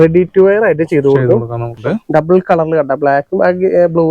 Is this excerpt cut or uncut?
cut